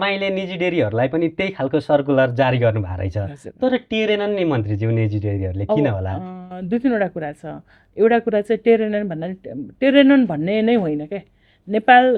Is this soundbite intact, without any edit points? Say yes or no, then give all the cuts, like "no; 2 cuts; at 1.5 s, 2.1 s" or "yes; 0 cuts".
yes; 0 cuts